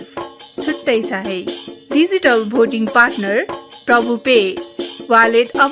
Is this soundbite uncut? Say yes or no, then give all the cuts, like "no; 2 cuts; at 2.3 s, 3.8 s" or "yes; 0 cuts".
yes; 0 cuts